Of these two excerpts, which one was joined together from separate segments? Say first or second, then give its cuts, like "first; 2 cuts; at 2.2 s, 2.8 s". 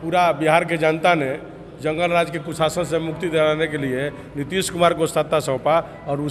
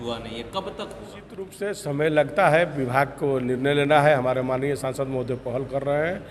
second; 1 cut; at 1.5 s